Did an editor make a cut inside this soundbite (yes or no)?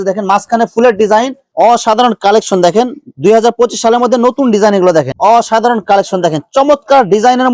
yes